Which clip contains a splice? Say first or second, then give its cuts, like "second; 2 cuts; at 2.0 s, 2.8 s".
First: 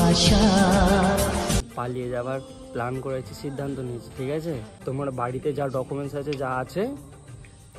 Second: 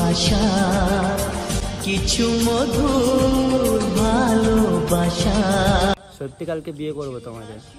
first; 2 cuts; at 1.7 s, 4.7 s